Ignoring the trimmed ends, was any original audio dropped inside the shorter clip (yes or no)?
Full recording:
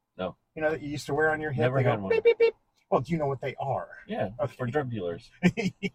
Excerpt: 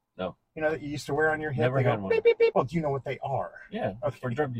yes